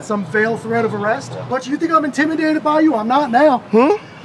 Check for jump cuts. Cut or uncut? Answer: cut